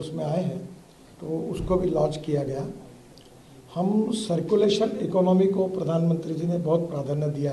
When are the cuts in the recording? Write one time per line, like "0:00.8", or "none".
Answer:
none